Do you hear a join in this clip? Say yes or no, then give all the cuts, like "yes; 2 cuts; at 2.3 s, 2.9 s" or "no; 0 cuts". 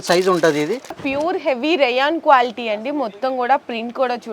yes; 1 cut; at 1.0 s